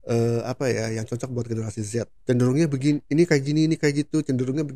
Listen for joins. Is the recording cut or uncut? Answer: cut